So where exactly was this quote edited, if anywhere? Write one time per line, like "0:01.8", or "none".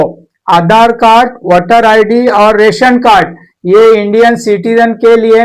none